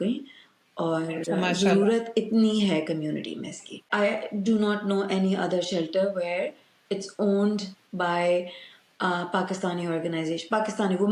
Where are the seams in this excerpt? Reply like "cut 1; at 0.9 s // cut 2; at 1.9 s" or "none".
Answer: cut 1; at 3.9 s